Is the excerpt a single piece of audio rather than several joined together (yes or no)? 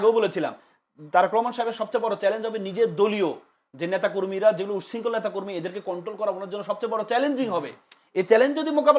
yes